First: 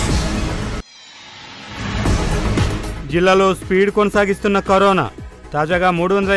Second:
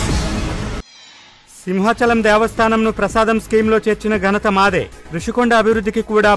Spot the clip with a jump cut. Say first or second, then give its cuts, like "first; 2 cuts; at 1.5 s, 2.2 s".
first; 2 cuts; at 1.0 s, 2.8 s